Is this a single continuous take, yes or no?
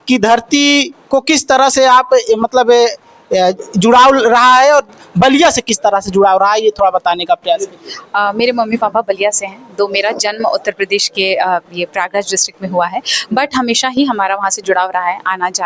yes